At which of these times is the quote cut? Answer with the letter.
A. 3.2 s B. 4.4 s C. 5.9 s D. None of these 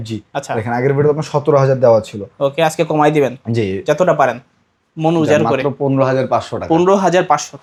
D